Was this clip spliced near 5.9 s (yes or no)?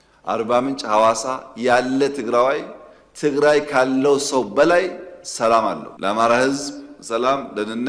yes